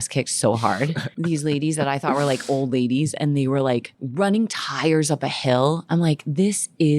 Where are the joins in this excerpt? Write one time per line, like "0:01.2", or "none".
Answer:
0:01.1
0:04.0